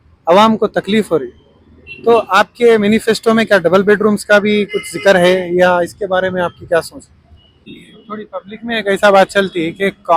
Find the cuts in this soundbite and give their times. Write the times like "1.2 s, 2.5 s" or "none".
7.7 s

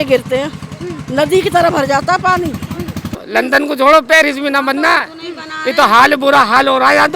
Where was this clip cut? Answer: 3.2 s

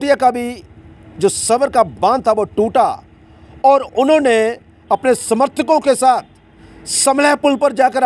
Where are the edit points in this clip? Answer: none

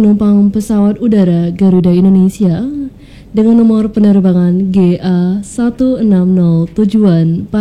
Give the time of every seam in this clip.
none

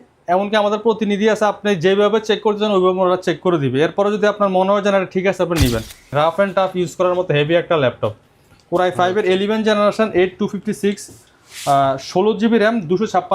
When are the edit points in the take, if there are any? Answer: 6.1 s

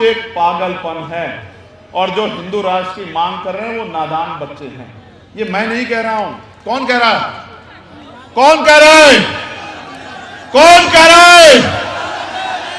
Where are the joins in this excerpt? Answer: none

